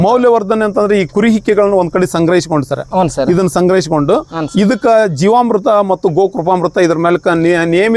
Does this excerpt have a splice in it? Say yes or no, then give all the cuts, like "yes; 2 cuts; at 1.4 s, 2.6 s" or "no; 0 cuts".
no; 0 cuts